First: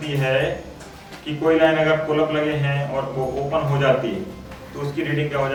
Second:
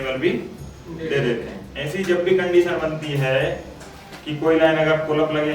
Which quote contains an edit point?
second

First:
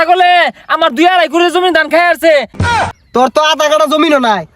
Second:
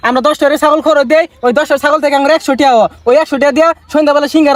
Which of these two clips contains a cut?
first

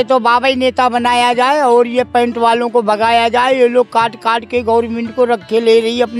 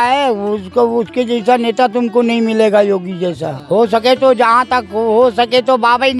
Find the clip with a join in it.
second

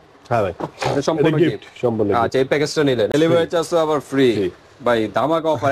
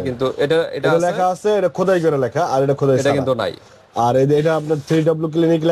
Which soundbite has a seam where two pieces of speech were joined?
first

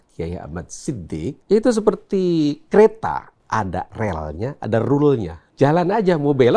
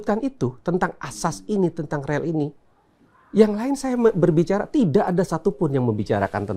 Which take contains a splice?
first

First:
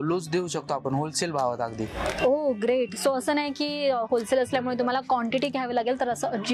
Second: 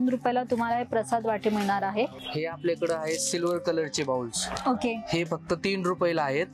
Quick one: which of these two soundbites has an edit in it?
second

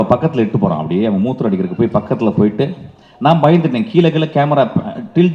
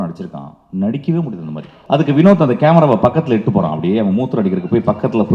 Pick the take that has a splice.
second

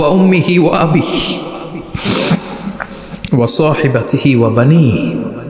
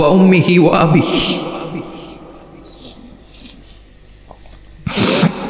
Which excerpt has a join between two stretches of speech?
first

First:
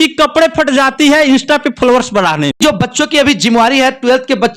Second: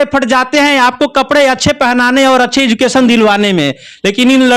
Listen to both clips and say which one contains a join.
first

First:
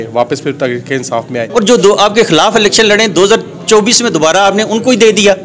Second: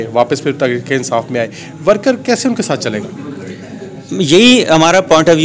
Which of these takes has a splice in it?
first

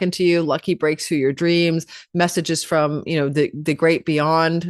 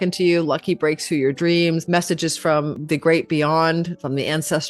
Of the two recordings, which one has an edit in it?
second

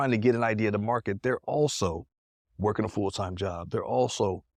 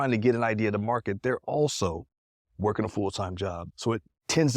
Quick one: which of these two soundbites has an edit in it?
second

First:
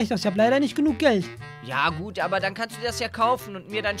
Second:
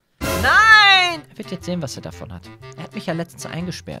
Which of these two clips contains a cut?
second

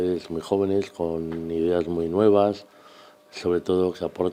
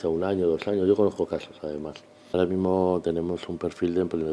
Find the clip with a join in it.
second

